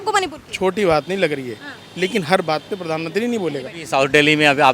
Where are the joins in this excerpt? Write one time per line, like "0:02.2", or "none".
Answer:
0:03.8